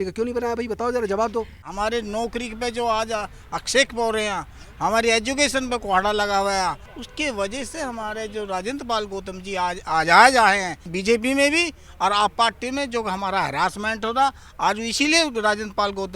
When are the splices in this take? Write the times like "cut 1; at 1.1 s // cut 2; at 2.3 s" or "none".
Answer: cut 1; at 1.7 s // cut 2; at 6.9 s // cut 3; at 10.9 s